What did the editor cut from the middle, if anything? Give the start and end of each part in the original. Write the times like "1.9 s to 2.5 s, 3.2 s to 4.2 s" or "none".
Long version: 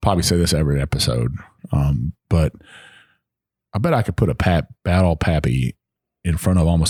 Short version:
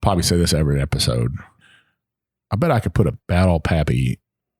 1.5 s to 2.7 s, 4.4 s to 4.7 s